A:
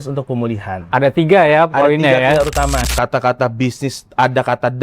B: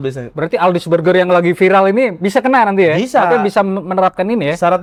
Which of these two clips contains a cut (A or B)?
A